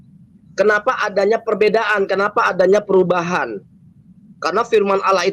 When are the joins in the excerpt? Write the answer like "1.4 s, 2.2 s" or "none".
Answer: none